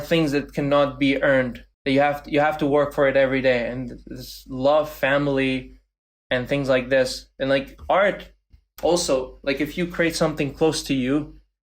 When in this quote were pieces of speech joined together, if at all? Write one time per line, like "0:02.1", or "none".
0:01.7